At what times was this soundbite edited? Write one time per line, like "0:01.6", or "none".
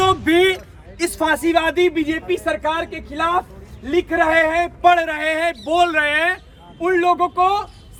none